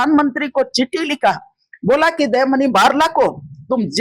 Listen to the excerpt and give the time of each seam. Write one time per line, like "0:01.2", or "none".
none